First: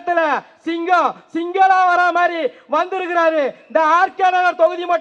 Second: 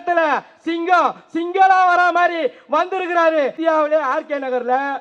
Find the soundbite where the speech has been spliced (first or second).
second